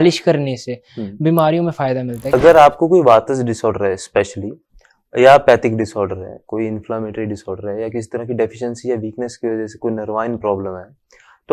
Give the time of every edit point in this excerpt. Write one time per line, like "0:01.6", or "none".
0:02.3